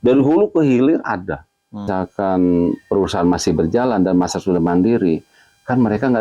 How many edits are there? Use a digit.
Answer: 1